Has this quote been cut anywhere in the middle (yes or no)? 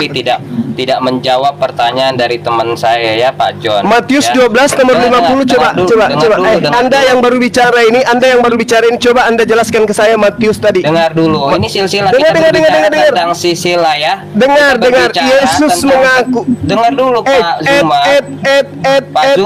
no